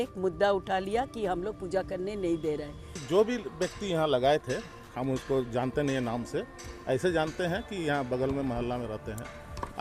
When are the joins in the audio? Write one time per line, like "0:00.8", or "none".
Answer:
0:03.0

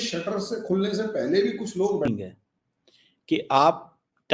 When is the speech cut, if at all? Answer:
0:02.1

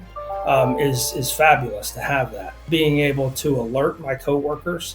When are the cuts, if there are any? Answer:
0:02.6

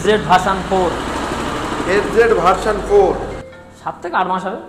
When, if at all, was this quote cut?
0:03.5

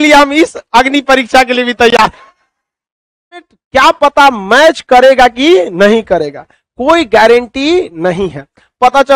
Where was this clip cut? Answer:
0:03.6

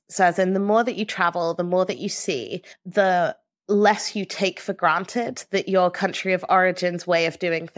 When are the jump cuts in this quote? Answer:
none

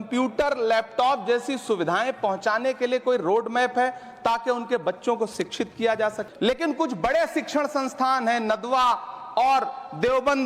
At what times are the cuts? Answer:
0:06.2

